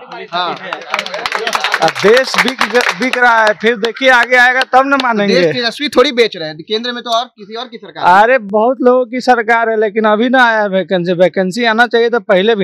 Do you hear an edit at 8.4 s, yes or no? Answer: no